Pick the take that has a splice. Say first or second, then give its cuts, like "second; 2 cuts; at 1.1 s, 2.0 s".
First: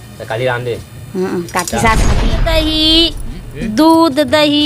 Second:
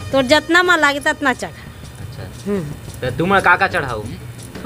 first; 1 cut; at 2.2 s